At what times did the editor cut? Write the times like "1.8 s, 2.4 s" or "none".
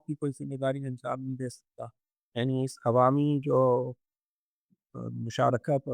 2.3 s